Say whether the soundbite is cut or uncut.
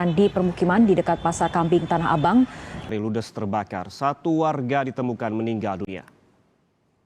cut